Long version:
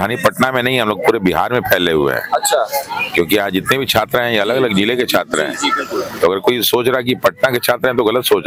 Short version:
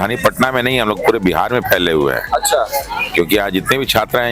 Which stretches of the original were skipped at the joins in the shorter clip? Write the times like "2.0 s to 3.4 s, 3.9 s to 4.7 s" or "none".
none